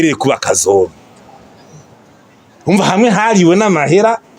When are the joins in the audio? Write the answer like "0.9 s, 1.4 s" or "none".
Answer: none